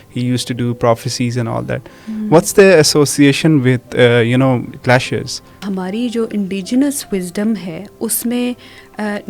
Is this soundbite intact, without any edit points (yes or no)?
no